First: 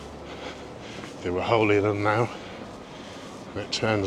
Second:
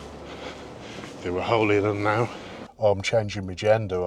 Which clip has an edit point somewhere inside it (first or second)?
second